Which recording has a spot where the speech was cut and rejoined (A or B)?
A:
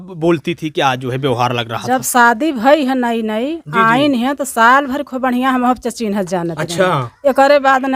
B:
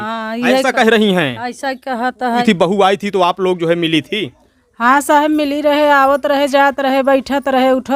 B